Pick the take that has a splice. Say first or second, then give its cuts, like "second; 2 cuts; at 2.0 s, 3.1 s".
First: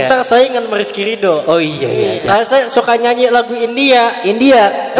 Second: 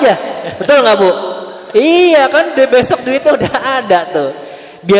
first; 1 cut; at 2.2 s